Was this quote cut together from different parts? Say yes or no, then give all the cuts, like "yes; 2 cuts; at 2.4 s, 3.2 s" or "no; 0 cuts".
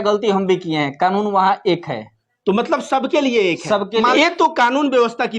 yes; 1 cut; at 4.1 s